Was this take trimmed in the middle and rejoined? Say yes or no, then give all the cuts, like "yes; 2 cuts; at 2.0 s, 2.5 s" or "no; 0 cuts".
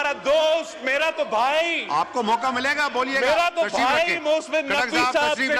no; 0 cuts